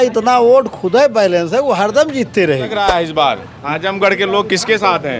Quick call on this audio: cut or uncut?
cut